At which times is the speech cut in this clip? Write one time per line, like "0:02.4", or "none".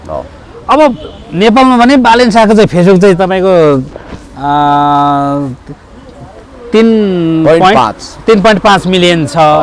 none

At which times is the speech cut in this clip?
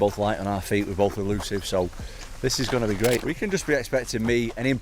0:03.2

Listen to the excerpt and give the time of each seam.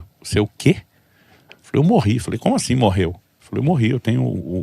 none

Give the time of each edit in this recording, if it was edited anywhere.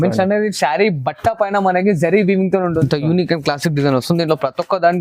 0:02.8

